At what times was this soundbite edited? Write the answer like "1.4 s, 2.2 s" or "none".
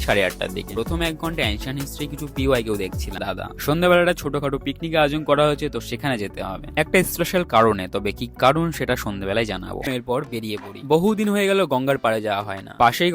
3.2 s, 9.9 s